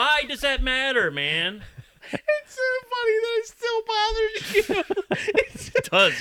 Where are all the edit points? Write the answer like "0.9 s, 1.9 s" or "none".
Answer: 1.9 s